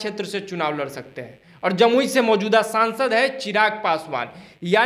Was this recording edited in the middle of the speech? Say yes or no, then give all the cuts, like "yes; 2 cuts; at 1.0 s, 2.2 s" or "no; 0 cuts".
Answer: no; 0 cuts